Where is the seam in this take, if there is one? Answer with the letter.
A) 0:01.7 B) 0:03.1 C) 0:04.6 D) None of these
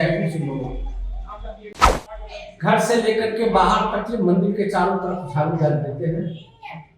A